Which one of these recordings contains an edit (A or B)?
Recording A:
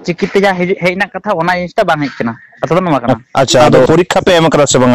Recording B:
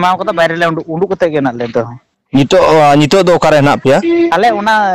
A